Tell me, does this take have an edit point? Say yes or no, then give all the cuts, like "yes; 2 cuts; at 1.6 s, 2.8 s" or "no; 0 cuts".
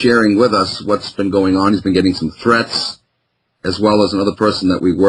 yes; 1 cut; at 4.1 s